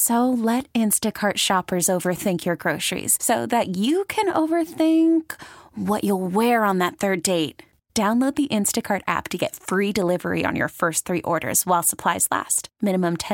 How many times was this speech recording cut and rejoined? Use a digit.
0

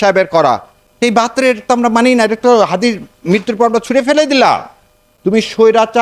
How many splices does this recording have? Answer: 2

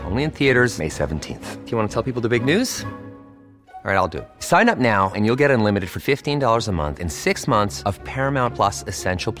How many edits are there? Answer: 0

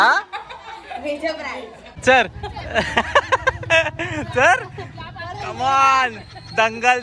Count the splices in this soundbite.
1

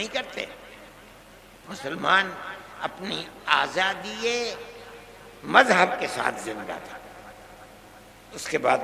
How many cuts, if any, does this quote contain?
1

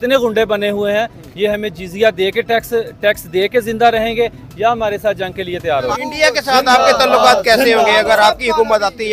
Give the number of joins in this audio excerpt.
1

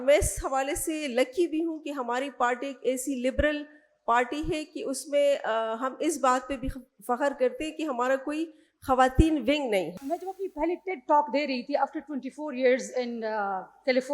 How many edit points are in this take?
1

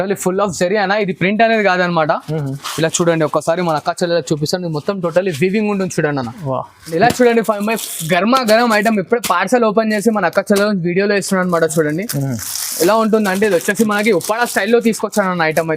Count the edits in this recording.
1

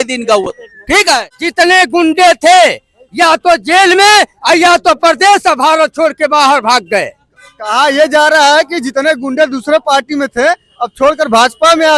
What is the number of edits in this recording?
1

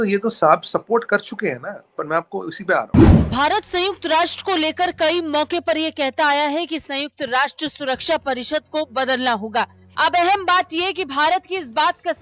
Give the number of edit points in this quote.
2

